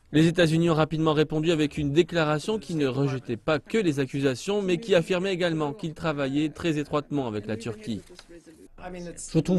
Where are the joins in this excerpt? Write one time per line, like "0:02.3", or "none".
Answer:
none

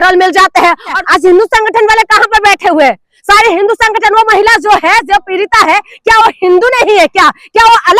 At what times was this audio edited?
0:01.0

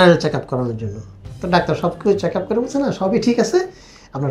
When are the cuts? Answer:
none

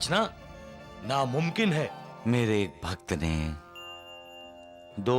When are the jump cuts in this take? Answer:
0:02.1

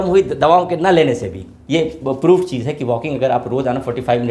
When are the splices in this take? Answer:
0:01.6

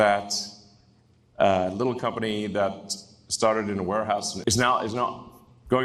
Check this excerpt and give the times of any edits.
0:04.3

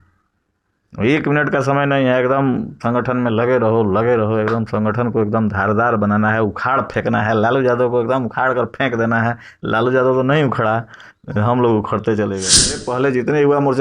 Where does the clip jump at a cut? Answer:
0:12.8

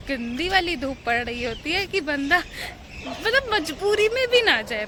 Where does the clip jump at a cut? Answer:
none

